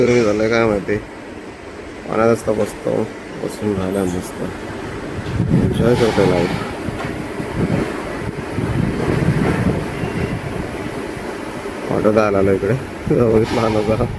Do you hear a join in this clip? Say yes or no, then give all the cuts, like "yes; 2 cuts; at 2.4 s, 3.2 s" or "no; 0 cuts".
no; 0 cuts